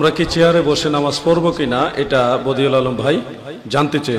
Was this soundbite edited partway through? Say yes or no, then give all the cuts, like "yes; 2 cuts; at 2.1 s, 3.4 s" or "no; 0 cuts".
no; 0 cuts